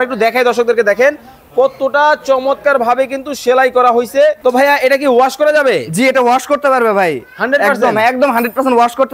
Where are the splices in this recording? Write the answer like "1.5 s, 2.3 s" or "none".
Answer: 4.4 s